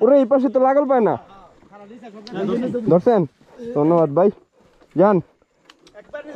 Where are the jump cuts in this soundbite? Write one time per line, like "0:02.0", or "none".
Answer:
none